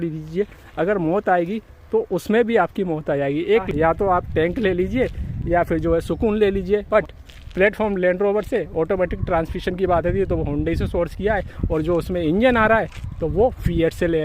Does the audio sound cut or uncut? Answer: cut